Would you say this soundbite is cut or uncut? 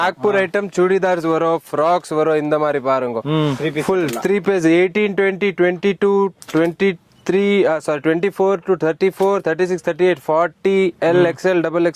uncut